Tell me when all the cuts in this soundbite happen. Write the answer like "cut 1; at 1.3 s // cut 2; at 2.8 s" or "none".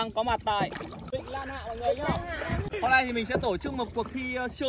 cut 1; at 1.0 s // cut 2; at 2.8 s